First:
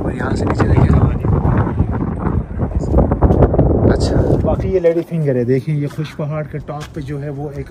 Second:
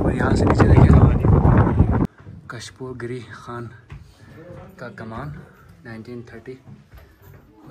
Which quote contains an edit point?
second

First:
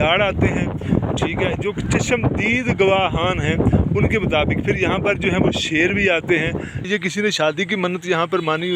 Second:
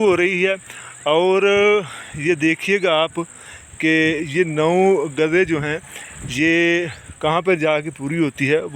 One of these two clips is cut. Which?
first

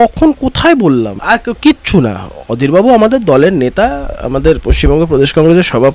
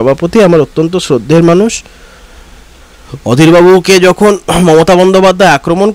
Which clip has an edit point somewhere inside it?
first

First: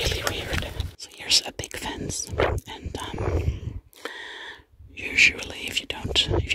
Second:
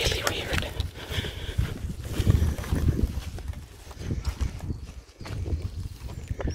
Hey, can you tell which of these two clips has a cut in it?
first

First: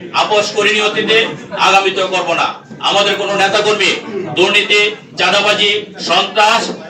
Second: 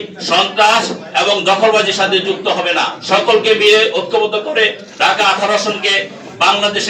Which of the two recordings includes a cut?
second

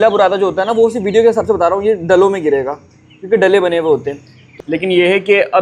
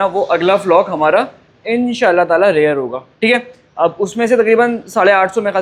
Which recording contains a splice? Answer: first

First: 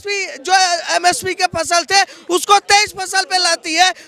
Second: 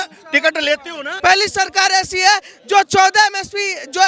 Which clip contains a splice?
second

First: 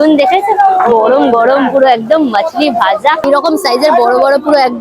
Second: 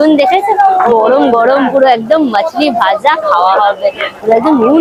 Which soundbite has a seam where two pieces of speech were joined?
first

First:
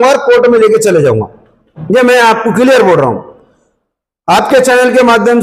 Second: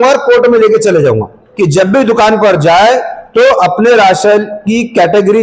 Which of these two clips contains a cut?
second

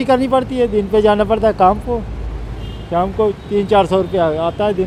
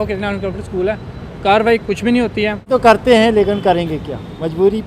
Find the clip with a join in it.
second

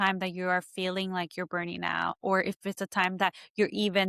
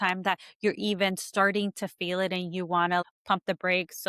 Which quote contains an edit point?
second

